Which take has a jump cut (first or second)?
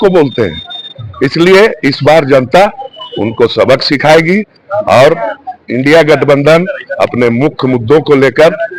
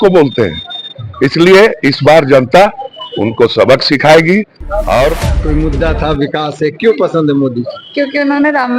second